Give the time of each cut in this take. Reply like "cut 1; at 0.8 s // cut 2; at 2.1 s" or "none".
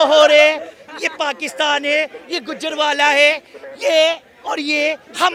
none